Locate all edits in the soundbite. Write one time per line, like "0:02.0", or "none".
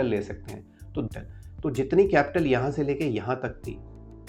0:01.1